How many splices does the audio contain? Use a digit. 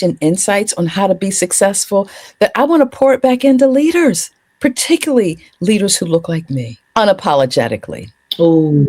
1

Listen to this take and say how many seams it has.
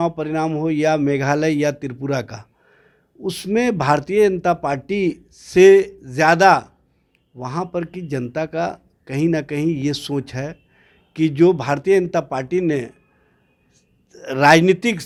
0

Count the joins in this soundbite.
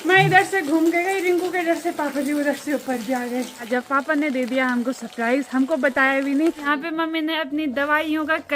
2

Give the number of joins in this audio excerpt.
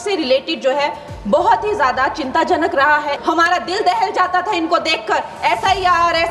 1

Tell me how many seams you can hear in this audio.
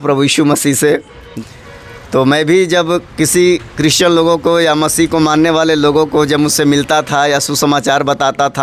1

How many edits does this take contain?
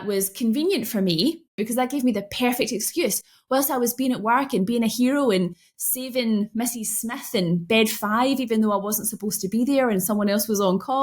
1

